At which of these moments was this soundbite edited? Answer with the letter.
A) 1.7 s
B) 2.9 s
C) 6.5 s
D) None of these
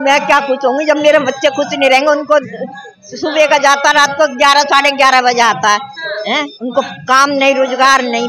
D